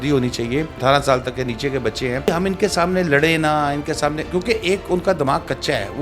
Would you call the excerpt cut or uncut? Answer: cut